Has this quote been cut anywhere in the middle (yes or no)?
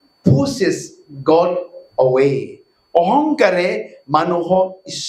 no